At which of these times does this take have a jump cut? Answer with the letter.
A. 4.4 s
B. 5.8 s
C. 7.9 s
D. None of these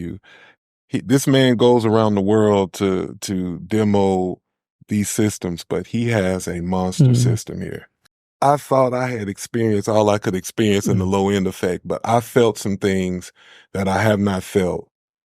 C